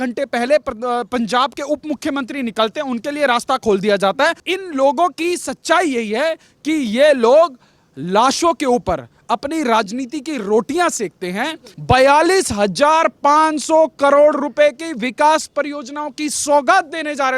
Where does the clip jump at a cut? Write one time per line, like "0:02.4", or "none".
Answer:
0:04.5
0:11.7